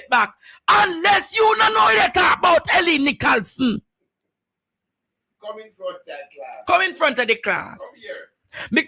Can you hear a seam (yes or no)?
no